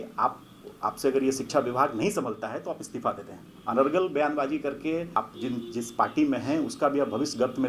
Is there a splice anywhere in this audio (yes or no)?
yes